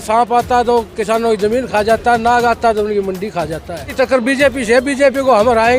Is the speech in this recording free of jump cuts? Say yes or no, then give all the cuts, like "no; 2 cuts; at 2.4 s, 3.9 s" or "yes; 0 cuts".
no; 1 cut; at 3.9 s